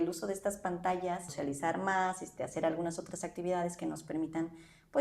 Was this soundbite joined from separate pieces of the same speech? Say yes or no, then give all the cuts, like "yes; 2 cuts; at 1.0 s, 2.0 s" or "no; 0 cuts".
yes; 1 cut; at 1.3 s